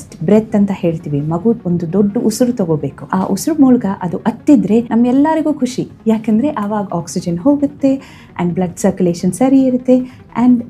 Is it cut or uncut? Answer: cut